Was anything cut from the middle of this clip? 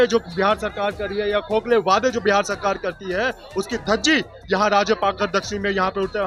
no; 0 cuts

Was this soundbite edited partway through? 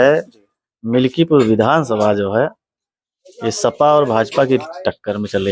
no; 0 cuts

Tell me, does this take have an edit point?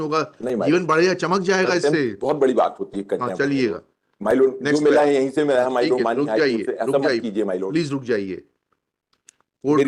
no; 0 cuts

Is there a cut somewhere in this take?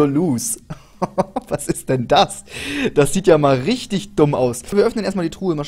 yes; 1 cut; at 4.7 s

